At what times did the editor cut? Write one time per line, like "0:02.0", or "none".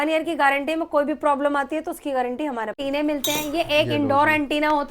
0:02.8